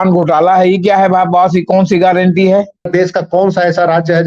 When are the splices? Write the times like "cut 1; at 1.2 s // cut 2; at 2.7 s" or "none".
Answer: cut 1; at 2.9 s